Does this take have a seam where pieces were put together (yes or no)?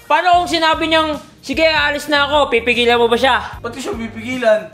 yes